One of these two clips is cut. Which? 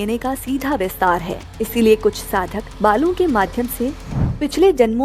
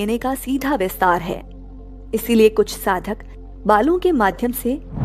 first; 2 cuts; at 1.4 s, 2.6 s

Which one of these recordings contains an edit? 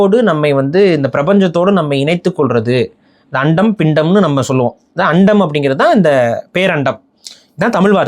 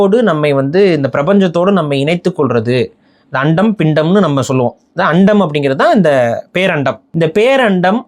second; 1 cut; at 7.0 s

